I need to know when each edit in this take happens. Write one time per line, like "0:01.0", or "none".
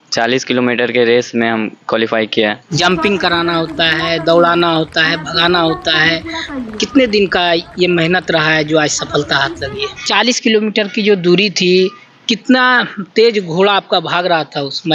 0:02.8
0:10.0

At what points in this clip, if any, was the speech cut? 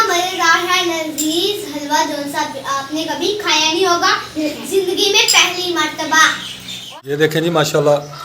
0:06.9

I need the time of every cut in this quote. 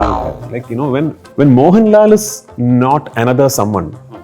0:01.2

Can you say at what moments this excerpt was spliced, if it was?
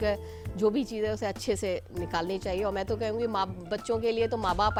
none

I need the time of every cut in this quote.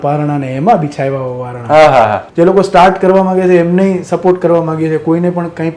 0:02.2

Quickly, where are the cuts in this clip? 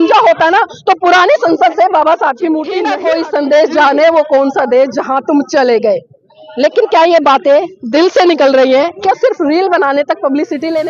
0:02.9

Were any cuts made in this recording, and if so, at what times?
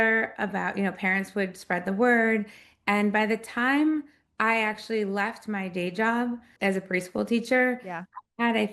none

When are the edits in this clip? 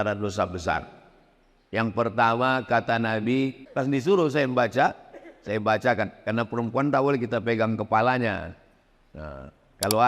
0:03.6

